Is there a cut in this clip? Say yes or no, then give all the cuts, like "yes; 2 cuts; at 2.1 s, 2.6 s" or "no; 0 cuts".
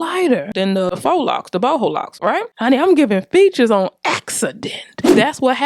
yes; 2 cuts; at 1.0 s, 2.5 s